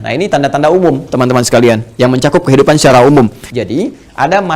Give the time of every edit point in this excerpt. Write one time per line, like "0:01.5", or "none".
0:03.5